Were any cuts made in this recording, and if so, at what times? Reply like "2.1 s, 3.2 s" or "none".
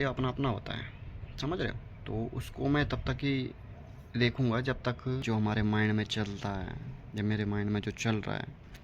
5.2 s